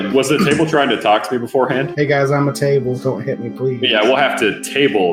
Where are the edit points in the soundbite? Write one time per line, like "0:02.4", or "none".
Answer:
0:01.9